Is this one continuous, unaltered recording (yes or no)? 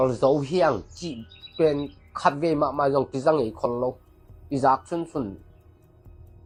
yes